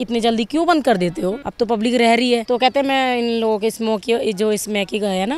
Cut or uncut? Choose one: cut